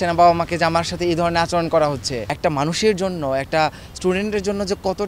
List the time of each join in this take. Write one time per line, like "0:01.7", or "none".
0:02.3